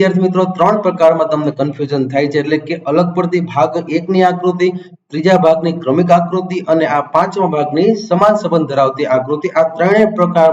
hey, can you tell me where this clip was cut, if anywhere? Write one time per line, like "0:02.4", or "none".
none